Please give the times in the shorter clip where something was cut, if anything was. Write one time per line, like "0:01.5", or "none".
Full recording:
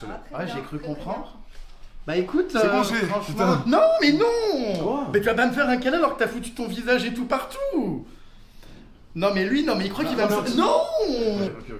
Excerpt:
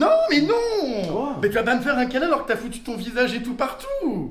none